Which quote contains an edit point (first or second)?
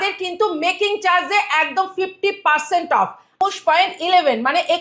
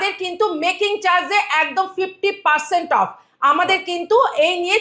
first